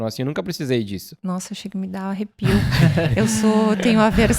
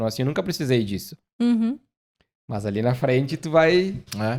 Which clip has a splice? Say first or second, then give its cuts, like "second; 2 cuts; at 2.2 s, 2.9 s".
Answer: first; 1 cut; at 1.2 s